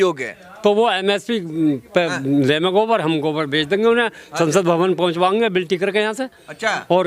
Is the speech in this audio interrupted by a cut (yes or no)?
no